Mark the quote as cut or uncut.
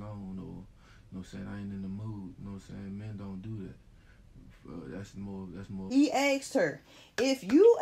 cut